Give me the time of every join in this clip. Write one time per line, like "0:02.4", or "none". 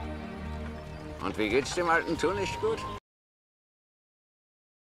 none